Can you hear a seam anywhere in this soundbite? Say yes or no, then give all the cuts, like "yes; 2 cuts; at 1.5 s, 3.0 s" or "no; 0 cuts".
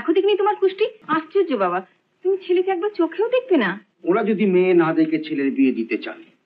yes; 2 cuts; at 1.0 s, 3.9 s